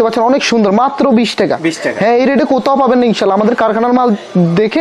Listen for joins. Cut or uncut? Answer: uncut